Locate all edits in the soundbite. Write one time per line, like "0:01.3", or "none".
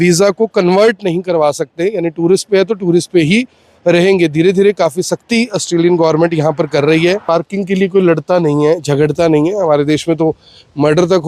0:07.2

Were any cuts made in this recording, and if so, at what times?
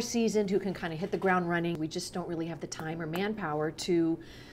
0:01.8

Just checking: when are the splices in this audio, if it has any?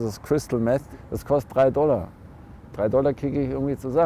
0:00.9

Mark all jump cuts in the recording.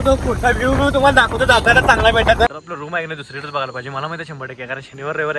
0:02.5

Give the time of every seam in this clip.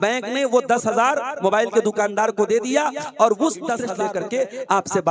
0:04.0

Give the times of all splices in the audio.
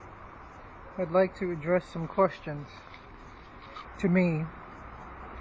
none

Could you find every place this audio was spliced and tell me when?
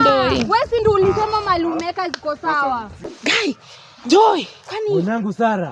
0:02.9

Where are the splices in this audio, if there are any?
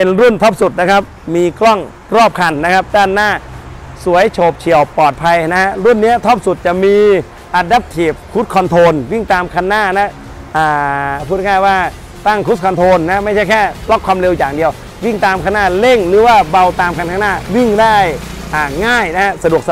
none

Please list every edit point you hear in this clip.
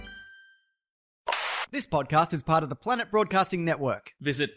0:01.2

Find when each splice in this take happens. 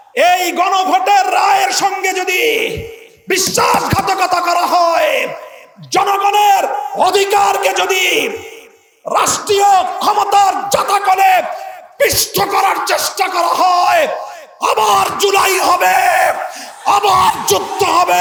none

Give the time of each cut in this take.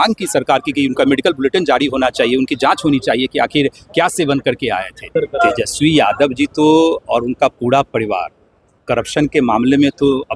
0:05.1

